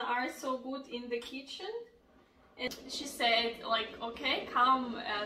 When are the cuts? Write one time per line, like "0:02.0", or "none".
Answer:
0:02.7